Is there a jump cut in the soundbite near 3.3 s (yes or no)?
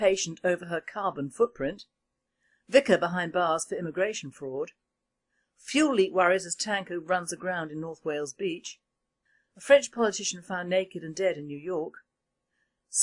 yes